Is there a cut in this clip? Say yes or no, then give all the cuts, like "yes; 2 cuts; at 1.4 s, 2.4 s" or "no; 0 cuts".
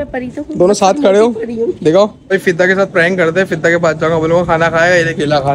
yes; 1 cut; at 2.2 s